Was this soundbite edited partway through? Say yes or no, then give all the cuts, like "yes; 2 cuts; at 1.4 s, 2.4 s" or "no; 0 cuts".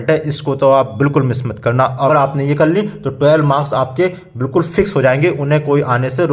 yes; 1 cut; at 1.9 s